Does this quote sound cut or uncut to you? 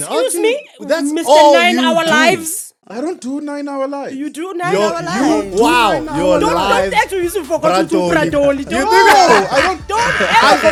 uncut